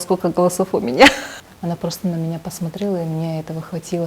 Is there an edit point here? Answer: yes; 1 cut; at 1.3 s

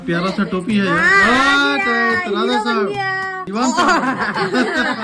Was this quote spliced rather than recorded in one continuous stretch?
no; 0 cuts

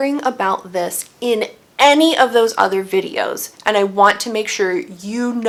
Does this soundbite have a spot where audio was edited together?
no; 0 cuts

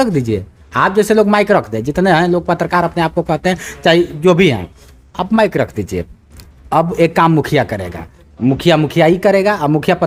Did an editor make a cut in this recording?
no; 0 cuts

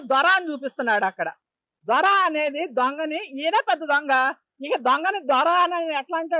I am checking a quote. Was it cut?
no; 0 cuts

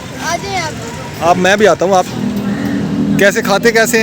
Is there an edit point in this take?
yes; 1 cut; at 2.1 s

